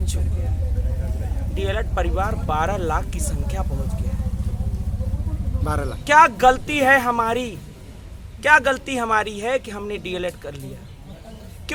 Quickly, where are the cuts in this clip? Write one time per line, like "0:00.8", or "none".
none